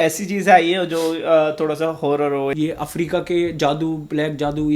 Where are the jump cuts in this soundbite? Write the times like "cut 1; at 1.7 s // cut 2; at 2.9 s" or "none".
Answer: cut 1; at 2.5 s